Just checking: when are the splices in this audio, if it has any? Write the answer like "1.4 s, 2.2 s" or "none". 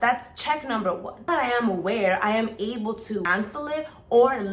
1.3 s, 3.3 s